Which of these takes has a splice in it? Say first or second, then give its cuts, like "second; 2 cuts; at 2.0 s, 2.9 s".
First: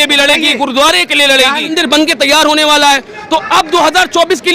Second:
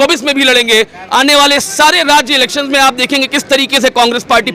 first; 1 cut; at 1.7 s